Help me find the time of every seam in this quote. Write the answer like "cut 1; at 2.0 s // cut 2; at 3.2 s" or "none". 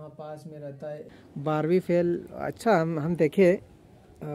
cut 1; at 1.1 s